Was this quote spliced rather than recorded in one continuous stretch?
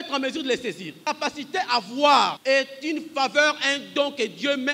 yes; 2 cuts; at 1.0 s, 2.4 s

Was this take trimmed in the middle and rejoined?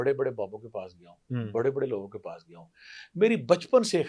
no; 0 cuts

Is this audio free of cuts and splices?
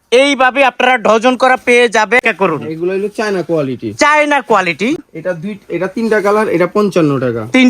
no; 2 cuts; at 2.2 s, 5.0 s

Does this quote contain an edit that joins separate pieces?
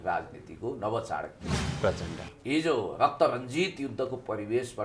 yes; 1 cut; at 2.3 s

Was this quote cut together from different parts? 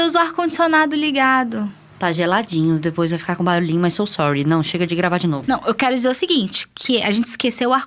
yes; 2 cuts; at 1.8 s, 5.4 s

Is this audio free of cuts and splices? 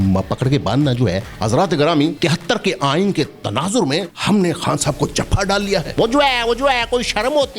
no; 4 cuts; at 1.3 s, 2.2 s, 4.1 s, 5.9 s

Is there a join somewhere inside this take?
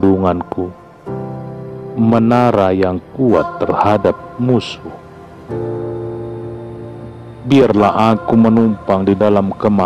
yes; 2 cuts; at 5.5 s, 7.3 s

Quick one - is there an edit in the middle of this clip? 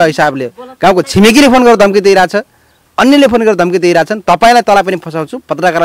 no; 0 cuts

